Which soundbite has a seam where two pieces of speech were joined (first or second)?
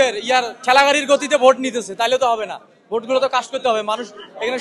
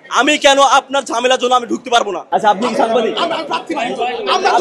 second